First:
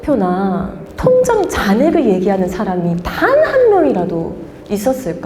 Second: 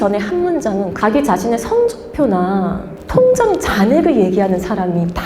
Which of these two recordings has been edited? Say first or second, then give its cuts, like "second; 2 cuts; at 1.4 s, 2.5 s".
second; 1 cut; at 0.9 s